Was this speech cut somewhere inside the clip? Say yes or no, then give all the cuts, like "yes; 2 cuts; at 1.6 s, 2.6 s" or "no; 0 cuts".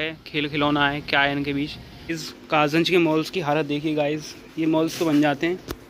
yes; 1 cut; at 2.0 s